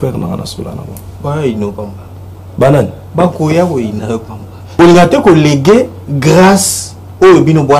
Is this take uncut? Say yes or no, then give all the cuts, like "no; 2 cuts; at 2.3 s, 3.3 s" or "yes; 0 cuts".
no; 1 cut; at 4.7 s